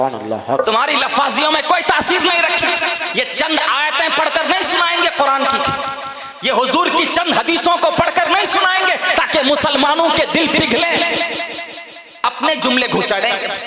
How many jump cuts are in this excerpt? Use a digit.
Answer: 0